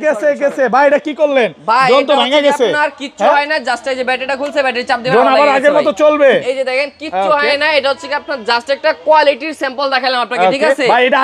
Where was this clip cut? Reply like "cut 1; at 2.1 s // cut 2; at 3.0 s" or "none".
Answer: none